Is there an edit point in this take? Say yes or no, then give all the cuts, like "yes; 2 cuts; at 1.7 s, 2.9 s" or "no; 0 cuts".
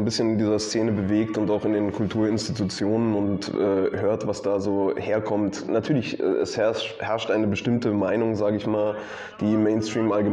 no; 0 cuts